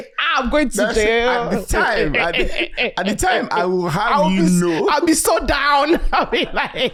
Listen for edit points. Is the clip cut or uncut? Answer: uncut